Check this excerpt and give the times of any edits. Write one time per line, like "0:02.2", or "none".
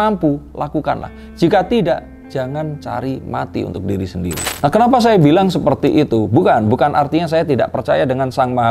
0:04.5